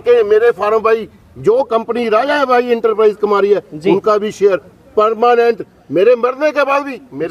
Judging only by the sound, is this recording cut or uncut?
uncut